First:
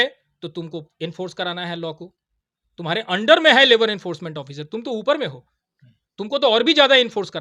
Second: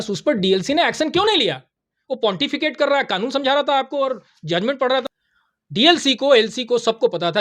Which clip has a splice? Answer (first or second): second